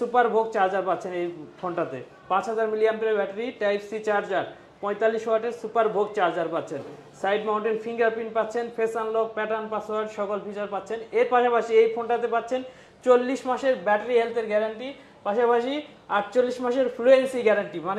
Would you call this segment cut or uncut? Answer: uncut